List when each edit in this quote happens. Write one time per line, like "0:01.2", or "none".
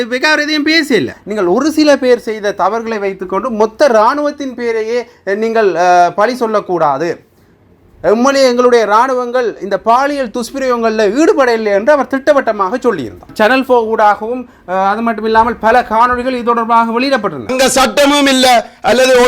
0:01.2
0:13.3
0:17.5